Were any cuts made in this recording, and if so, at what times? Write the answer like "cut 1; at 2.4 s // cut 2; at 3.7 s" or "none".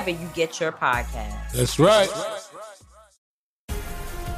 cut 1; at 3.1 s